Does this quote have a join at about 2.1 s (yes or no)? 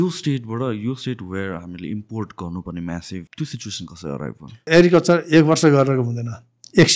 no